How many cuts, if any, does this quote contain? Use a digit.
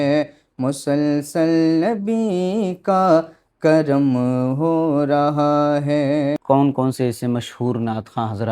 1